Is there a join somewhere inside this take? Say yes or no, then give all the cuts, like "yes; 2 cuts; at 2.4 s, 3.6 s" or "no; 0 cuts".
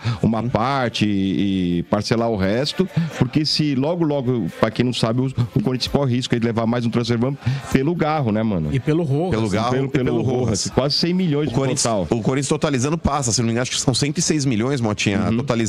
no; 0 cuts